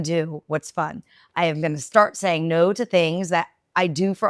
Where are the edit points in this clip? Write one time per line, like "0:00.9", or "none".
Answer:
0:01.8